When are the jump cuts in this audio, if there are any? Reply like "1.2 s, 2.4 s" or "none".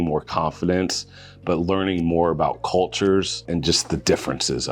3.4 s

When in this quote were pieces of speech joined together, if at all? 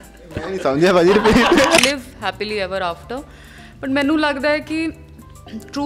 1.8 s

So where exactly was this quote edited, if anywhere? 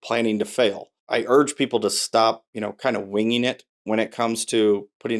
1.0 s

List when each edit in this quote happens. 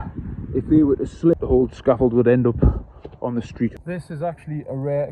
1.3 s, 3.7 s

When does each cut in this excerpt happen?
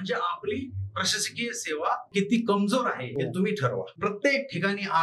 2.1 s, 3.0 s, 3.9 s

